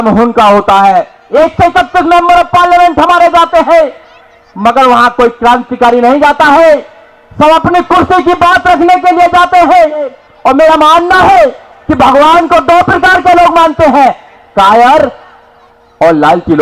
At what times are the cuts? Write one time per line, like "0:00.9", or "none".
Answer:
0:01.2
0:10.2